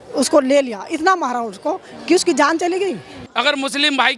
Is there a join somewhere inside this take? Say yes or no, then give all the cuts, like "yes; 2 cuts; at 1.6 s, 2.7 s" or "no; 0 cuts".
yes; 1 cut; at 3.2 s